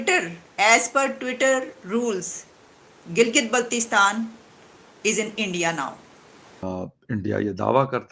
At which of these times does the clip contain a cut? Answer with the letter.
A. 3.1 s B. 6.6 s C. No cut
B